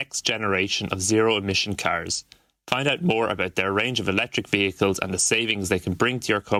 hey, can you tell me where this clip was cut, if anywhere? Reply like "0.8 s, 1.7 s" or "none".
none